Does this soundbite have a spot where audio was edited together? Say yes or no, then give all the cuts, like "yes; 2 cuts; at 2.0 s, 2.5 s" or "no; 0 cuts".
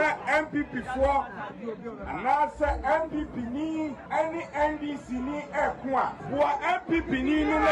yes; 2 cuts; at 4.0 s, 6.2 s